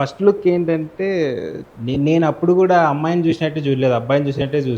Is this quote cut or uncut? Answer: cut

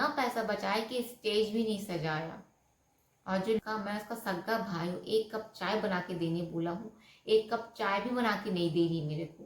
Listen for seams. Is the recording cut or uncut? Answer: cut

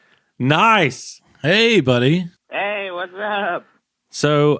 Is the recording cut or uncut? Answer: cut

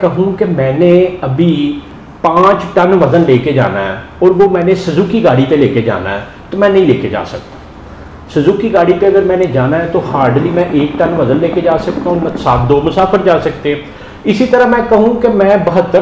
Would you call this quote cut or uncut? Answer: uncut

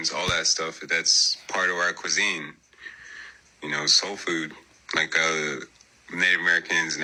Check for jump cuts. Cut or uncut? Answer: uncut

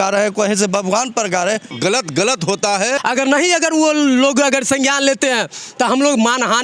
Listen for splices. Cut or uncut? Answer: cut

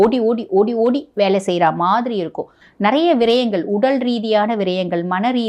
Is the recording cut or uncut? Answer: cut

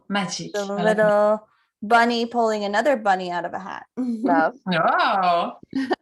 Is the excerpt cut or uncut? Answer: uncut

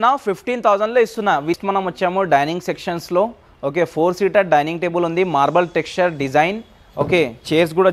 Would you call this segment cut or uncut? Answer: cut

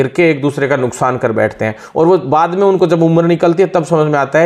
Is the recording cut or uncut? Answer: uncut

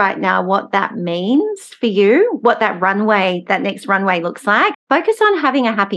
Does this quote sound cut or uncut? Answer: cut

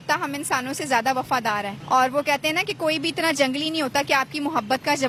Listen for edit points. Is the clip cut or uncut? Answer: uncut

